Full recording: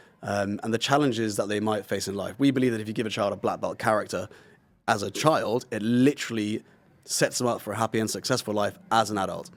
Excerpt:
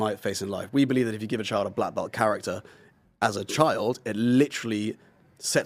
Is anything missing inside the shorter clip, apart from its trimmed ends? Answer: no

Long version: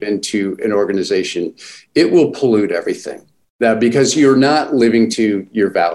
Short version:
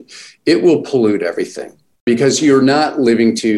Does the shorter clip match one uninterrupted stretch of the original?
no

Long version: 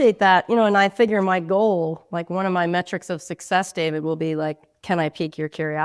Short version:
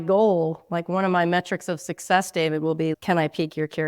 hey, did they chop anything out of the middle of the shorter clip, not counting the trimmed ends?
yes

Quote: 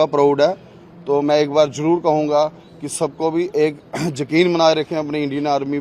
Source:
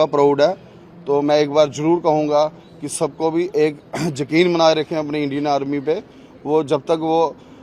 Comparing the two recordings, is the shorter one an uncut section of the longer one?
yes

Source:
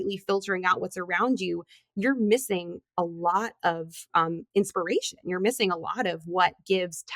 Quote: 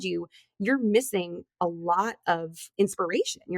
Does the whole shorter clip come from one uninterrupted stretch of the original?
no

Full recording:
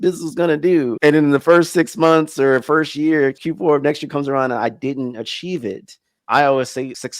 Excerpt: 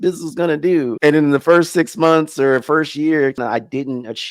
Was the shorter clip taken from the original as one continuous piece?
no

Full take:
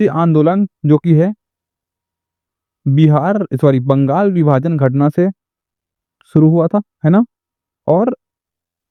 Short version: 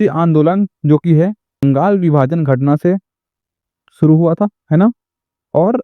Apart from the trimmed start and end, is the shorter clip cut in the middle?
yes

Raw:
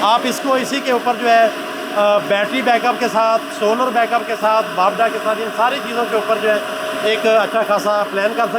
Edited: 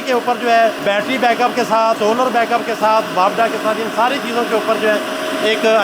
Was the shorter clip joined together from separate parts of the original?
yes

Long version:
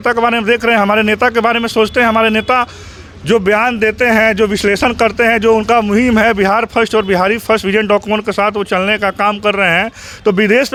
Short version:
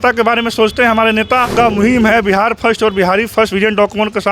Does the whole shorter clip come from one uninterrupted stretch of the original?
no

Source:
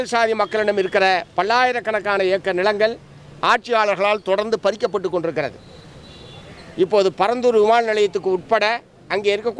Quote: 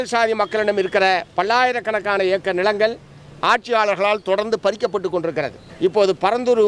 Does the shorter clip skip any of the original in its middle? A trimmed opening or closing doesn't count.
yes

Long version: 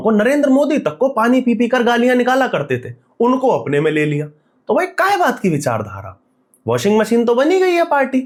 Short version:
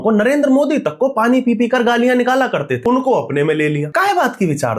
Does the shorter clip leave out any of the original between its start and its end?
yes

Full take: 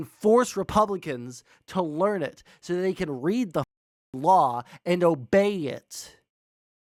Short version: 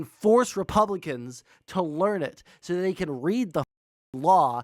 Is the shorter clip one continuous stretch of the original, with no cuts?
yes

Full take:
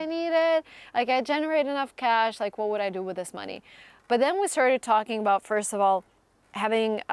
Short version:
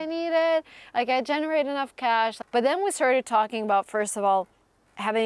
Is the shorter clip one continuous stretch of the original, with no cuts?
no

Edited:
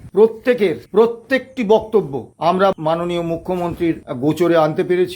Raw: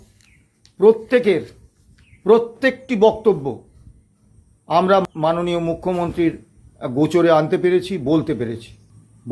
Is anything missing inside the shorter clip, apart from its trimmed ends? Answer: yes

